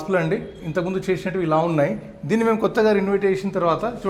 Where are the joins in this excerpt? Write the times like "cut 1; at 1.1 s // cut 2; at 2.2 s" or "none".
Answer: none